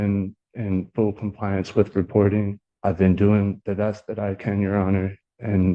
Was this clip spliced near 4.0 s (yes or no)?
no